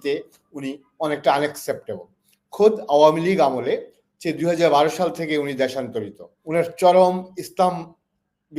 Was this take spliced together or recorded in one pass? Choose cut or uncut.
cut